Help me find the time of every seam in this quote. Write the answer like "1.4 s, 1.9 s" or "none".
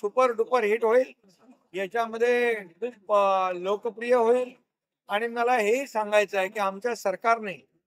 none

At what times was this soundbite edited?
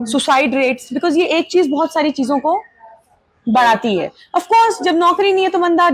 none

